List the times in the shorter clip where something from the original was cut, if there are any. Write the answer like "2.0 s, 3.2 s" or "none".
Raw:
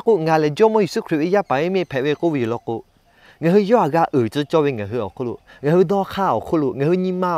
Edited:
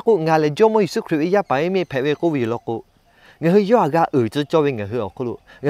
none